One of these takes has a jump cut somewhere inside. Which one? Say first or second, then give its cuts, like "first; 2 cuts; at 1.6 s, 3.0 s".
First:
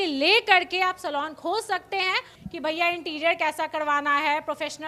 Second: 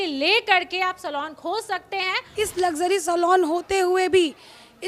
second; 1 cut; at 2.3 s